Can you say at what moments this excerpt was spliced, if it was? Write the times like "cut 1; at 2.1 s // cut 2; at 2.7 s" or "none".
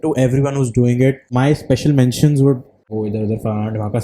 cut 1; at 1.3 s // cut 2; at 2.9 s